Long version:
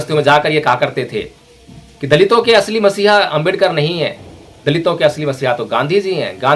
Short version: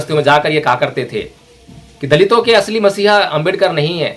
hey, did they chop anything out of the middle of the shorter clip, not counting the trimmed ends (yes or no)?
no